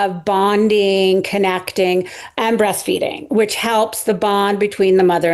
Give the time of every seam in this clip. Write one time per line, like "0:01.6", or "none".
none

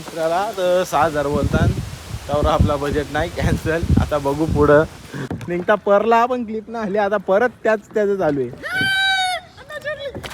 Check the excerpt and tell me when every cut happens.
0:05.3

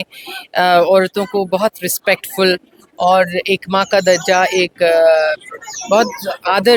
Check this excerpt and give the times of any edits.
none

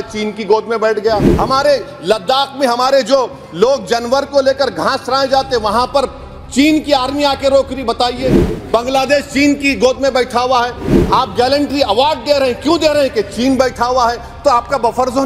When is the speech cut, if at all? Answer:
0:01.3

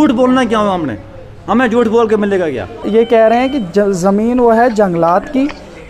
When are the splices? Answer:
0:02.8

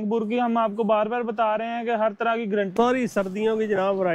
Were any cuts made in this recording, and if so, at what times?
0:02.7

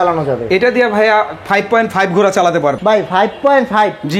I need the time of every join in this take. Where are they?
none

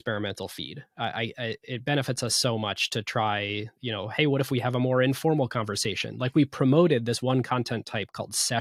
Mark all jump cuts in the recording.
none

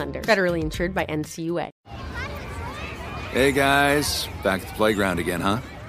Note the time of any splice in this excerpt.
0:01.7

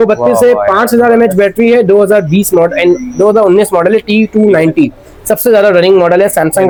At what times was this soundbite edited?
none

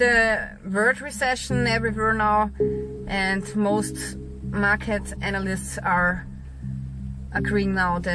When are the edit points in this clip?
none

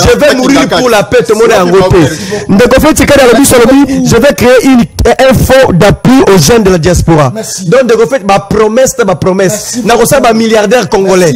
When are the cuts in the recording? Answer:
none

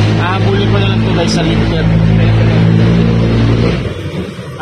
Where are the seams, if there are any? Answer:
0:03.2

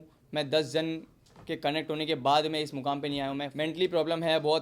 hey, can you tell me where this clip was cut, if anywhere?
0:03.5

